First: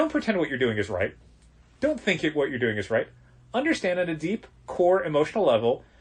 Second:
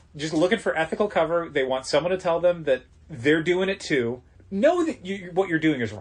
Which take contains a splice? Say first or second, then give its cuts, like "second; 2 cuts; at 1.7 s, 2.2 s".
second; 2 cuts; at 2.9 s, 4.3 s